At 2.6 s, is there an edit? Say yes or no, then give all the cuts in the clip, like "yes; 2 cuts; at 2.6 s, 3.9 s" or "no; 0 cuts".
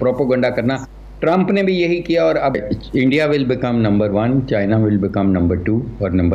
yes; 1 cut; at 2.6 s